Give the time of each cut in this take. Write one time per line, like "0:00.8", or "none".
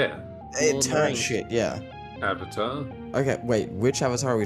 0:02.0
0:02.9